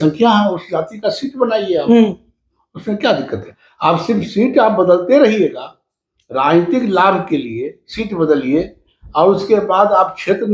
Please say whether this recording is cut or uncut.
uncut